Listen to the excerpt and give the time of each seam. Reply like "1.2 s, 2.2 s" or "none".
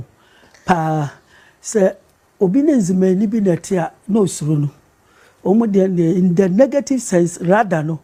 none

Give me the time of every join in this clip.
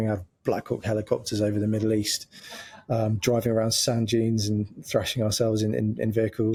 none

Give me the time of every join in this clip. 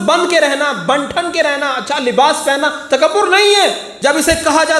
3.9 s

